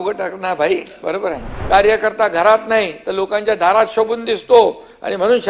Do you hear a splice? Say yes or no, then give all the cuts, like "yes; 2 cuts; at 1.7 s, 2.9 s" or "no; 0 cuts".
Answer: yes; 1 cut; at 1.5 s